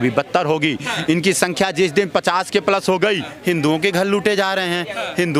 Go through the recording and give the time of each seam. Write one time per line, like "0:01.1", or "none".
0:03.3

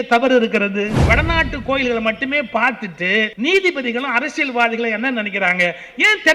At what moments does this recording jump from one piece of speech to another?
0:01.0
0:03.3

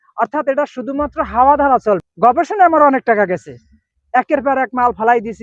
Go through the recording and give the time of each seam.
0:02.1

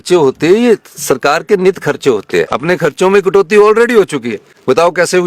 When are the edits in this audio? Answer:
0:02.5

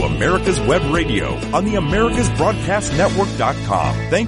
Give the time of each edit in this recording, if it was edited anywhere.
none

